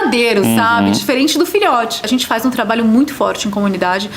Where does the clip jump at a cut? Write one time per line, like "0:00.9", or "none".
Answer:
0:02.0